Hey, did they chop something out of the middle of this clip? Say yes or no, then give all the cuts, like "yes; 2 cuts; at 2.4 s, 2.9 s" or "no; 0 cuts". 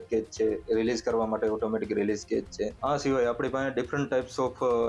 yes; 1 cut; at 2.8 s